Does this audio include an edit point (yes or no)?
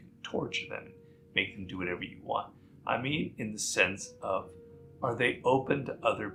no